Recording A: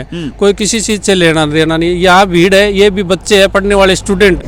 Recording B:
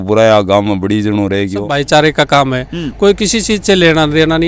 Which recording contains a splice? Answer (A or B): B